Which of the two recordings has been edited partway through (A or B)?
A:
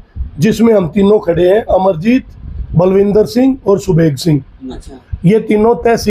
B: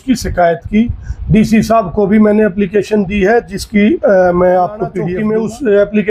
B